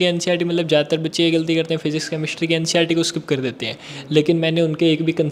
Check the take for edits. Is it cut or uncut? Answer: uncut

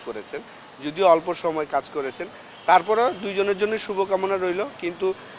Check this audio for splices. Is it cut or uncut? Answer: uncut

